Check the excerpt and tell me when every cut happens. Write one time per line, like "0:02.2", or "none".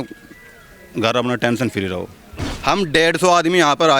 0:02.5